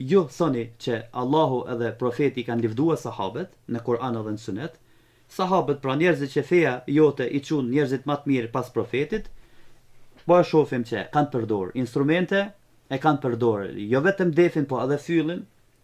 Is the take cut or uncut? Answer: uncut